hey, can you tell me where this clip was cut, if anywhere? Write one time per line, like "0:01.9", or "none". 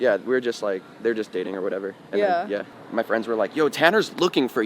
0:02.8